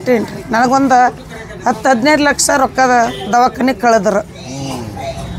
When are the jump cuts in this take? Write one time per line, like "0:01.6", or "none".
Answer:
none